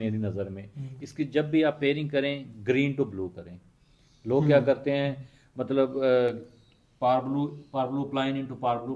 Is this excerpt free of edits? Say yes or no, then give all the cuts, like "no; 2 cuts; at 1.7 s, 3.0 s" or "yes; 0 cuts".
yes; 0 cuts